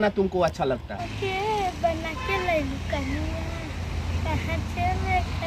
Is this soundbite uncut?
no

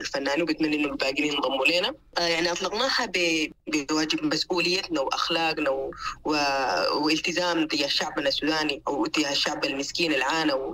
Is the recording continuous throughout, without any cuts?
no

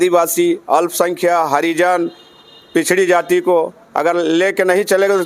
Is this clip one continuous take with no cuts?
yes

